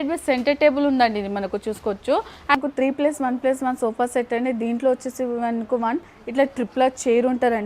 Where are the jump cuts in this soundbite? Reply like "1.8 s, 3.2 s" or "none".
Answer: 2.5 s